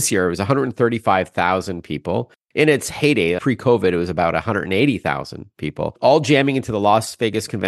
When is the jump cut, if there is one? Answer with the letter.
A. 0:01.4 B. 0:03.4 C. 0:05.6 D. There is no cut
B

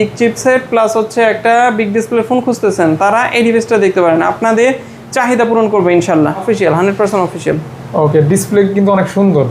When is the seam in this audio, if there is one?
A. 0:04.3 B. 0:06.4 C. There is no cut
B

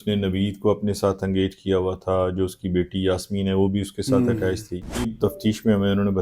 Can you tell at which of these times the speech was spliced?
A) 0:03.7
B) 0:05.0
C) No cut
B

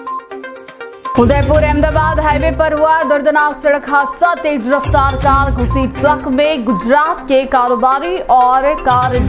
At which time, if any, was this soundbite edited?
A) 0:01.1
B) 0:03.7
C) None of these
C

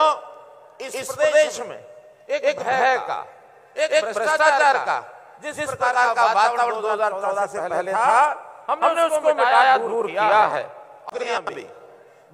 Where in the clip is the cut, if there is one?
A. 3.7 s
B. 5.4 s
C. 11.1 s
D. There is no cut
C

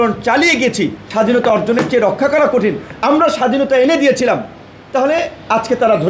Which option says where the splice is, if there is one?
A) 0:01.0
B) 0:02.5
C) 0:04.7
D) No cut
A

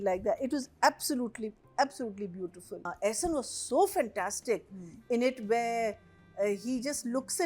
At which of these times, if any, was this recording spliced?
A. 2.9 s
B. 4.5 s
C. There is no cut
A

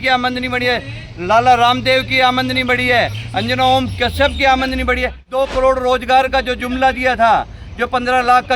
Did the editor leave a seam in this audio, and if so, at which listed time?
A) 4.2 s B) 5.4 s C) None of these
B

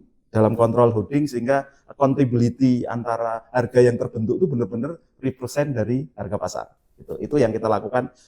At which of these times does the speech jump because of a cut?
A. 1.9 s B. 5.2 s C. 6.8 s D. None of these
D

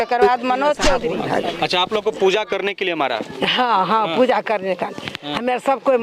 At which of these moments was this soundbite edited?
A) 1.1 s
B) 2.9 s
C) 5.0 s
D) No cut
A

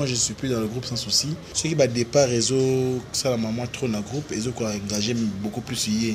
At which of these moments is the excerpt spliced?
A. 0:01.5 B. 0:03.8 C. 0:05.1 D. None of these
A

